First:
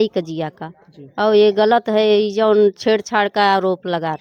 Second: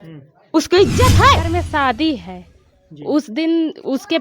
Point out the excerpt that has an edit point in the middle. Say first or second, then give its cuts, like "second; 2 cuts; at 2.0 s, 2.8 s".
second; 1 cut; at 1.5 s